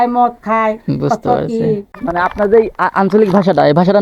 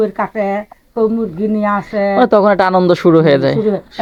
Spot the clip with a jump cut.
first; 1 cut; at 1.9 s

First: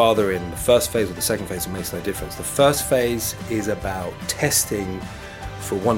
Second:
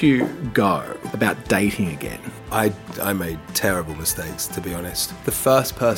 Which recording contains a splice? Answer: second; 3 cuts; at 1.0 s, 2.3 s, 5.0 s

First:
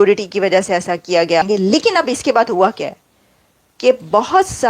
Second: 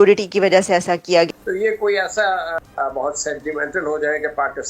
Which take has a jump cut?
second; 2 cuts; at 1.3 s, 2.6 s

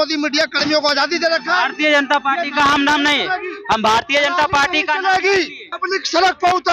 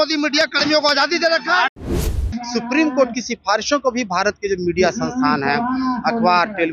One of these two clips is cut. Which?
second; 1 cut; at 1.9 s

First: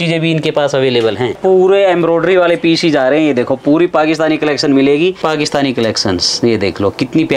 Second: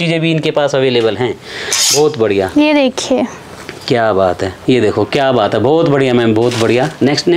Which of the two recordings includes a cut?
first; 2 cuts; at 1.4 s, 5.2 s

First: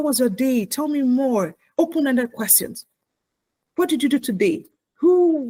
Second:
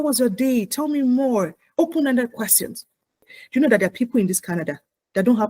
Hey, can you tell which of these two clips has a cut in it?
second; 1 cut; at 3.3 s

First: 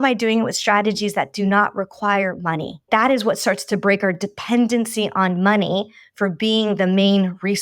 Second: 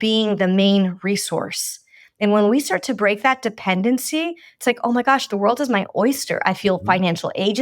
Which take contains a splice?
first; 1 cut; at 2.8 s

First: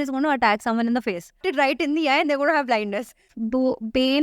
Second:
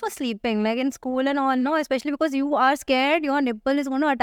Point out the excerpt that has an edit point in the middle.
first; 2 cuts; at 1.5 s, 3.3 s

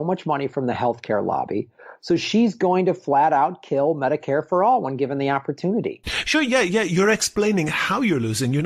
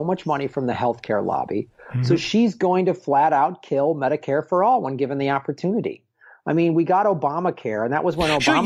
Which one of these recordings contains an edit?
first; 1 cut; at 6.3 s

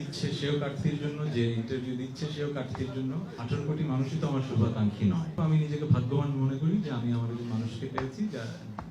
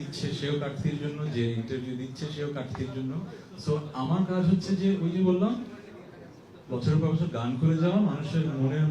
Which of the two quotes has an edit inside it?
first; 2 cuts; at 3.4 s, 5.3 s

